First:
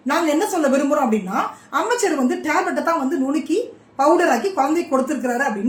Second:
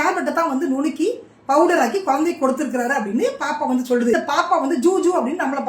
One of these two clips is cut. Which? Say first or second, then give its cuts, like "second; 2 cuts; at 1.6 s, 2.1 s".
second; 1 cut; at 4.2 s